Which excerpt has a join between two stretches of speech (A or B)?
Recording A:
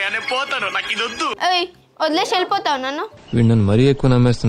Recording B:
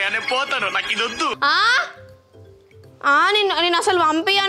A